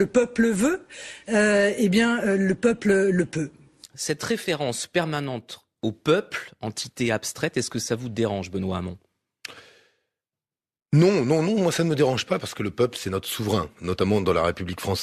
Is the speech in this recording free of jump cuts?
yes; 0 cuts

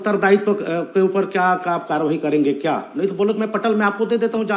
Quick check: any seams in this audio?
no; 0 cuts

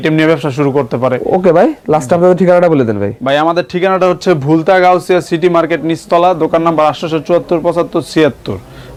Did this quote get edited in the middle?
no; 0 cuts

